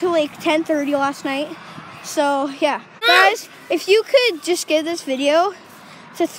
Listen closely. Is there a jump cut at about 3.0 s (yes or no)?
yes